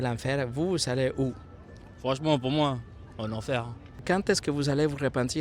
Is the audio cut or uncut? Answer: cut